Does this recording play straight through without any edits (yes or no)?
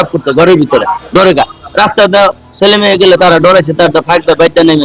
yes